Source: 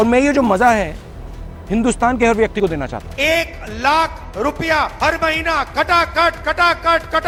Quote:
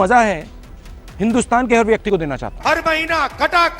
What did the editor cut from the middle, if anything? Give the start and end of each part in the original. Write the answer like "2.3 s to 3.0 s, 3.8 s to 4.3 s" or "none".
3.1 s to 4.9 s